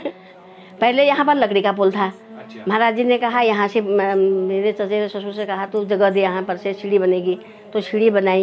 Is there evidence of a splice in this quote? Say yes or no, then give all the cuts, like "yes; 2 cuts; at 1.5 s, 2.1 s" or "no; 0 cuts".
no; 0 cuts